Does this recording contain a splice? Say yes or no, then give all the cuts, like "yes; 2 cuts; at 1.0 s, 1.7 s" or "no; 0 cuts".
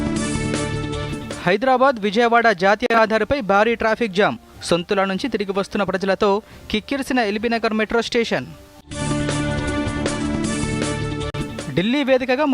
no; 0 cuts